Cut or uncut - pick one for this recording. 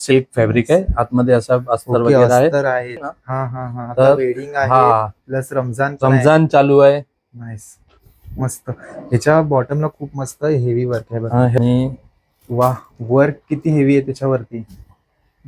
cut